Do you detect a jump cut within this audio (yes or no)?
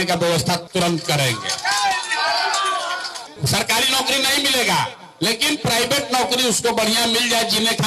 yes